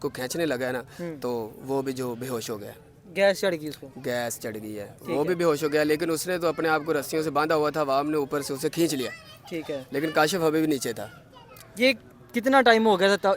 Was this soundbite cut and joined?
no; 0 cuts

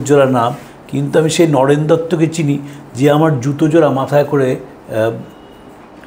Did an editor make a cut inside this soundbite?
no; 0 cuts

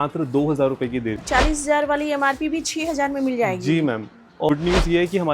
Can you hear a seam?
yes; 2 cuts; at 1.2 s, 4.5 s

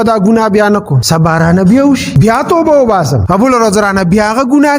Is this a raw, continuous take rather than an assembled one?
no; 3 cuts; at 1.0 s, 2.1 s, 3.2 s

